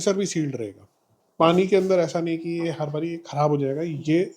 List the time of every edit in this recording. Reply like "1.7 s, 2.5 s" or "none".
1.1 s